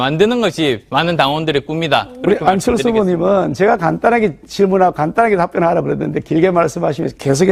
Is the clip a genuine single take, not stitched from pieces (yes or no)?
yes